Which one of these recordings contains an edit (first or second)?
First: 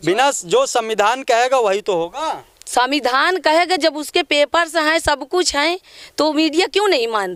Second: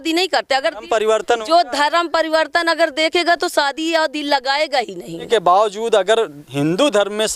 second